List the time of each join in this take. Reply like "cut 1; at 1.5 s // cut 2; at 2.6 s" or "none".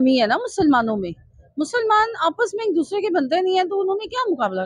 none